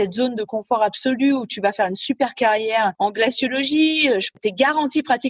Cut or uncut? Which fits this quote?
cut